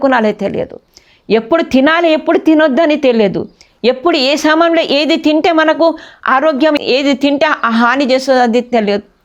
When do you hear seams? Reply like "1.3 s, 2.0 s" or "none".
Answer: 6.8 s